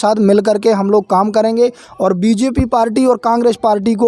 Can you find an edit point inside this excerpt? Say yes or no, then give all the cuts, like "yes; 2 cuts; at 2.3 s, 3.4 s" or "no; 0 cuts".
no; 0 cuts